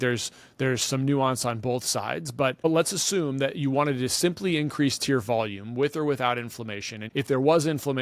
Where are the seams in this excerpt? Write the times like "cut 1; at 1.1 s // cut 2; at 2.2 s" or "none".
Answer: cut 1; at 2.6 s // cut 2; at 7.0 s